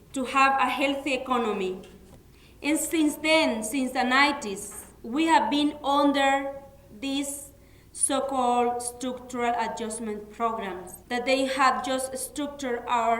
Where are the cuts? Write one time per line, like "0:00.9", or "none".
0:10.9